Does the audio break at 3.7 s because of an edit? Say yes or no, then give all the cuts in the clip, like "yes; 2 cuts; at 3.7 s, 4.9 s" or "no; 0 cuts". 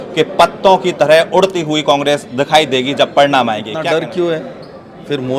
yes; 1 cut; at 3.7 s